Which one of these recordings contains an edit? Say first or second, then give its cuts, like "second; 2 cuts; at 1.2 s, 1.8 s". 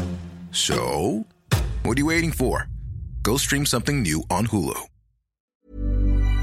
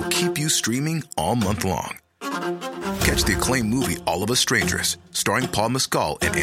first; 1 cut; at 5.4 s